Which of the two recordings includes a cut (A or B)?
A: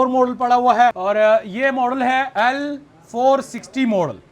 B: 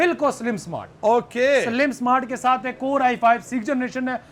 A